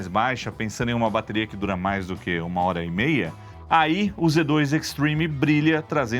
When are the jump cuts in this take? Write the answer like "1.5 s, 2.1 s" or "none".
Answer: none